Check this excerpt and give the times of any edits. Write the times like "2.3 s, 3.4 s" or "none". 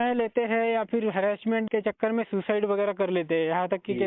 1.7 s